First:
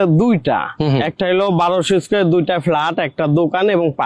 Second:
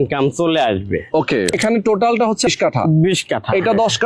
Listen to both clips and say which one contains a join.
second; 2 cuts; at 1.5 s, 2.5 s

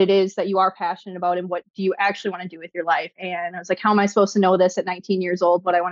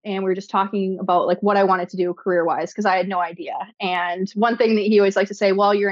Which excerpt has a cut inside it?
first; 1 cut; at 3.2 s

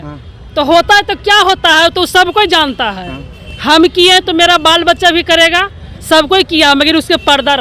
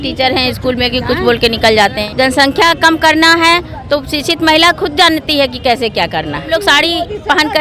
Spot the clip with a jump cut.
second; 2 cuts; at 2.0 s, 6.5 s

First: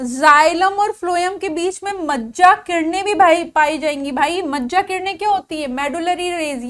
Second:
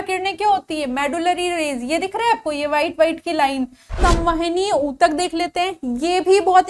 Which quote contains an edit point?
second; 1 cut; at 3.9 s

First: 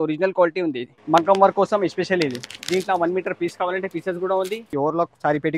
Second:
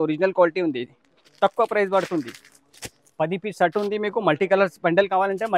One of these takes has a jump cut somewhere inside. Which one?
first; 2 cuts; at 0.9 s, 4.7 s

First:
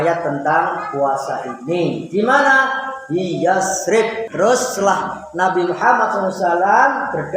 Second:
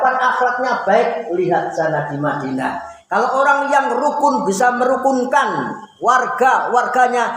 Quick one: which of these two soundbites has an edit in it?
first; 1 cut; at 4.2 s

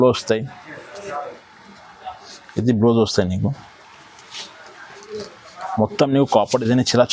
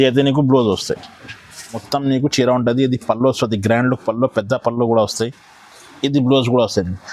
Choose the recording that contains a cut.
second; 1 cut; at 1.8 s

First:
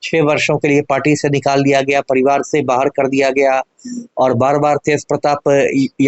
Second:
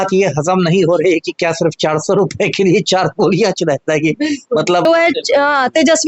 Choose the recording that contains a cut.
second; 1 cut; at 4.9 s

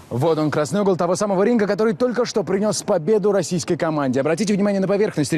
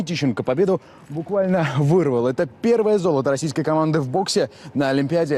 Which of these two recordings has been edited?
first; 1 cut; at 2.2 s

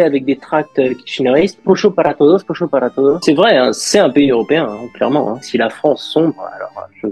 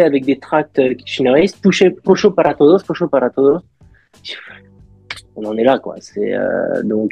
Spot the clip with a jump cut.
first; 3 cuts; at 1.6 s, 3.2 s, 5.4 s

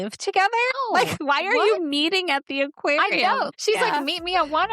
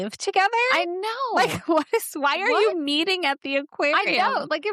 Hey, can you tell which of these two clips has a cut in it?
first; 2 cuts; at 1.1 s, 3.5 s

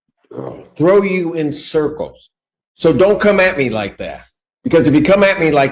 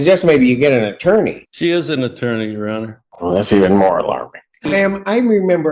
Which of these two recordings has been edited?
second; 3 cuts; at 1.4 s, 3.0 s, 4.7 s

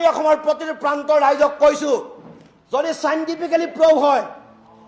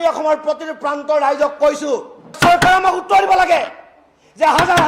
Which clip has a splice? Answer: second; 1 cut; at 2.4 s

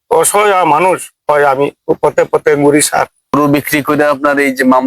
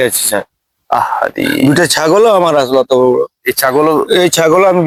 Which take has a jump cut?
first; 1 cut; at 3.3 s

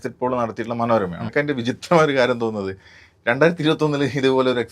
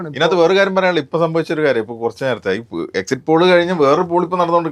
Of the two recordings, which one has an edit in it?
first; 1 cut; at 1.2 s

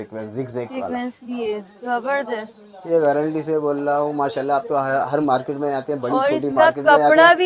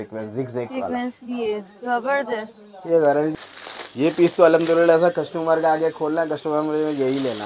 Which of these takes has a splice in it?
second; 1 cut; at 3.3 s

